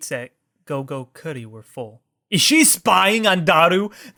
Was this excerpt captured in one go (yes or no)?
yes